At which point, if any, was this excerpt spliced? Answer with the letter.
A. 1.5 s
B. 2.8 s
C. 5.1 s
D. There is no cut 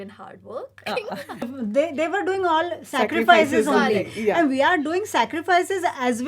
A